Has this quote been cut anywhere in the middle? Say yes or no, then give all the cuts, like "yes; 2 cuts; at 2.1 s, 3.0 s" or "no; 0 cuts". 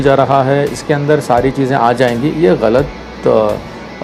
no; 0 cuts